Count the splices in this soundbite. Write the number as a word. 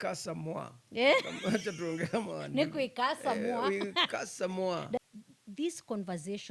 one